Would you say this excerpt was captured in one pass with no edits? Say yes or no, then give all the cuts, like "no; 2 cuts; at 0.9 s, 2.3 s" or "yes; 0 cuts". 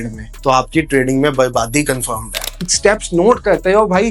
no; 1 cut; at 2.5 s